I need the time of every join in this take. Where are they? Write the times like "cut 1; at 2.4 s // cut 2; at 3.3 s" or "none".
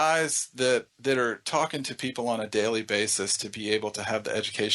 cut 1; at 0.9 s